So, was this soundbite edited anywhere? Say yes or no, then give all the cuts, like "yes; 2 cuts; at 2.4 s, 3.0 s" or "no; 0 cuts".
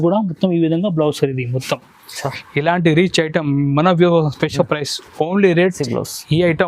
yes; 1 cut; at 5.8 s